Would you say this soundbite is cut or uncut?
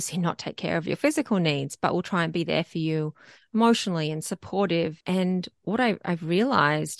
cut